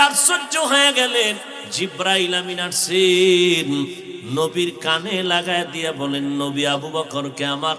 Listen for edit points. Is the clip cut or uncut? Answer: cut